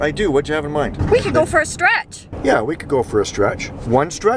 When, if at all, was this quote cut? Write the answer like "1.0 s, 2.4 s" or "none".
0.9 s, 2.2 s